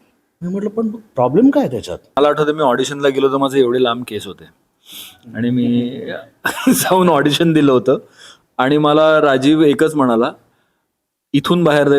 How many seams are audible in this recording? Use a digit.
1